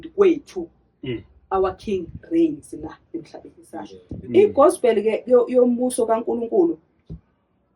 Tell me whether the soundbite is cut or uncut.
cut